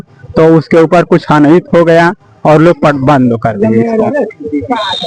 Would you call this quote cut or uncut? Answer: uncut